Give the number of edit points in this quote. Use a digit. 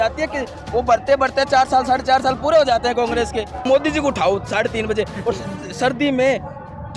1